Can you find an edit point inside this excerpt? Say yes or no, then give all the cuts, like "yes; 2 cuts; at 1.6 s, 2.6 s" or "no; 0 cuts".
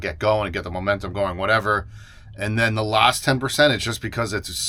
no; 0 cuts